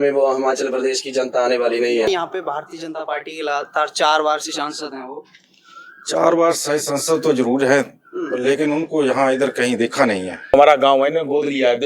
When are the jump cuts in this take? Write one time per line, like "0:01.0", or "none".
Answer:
0:02.1
0:10.5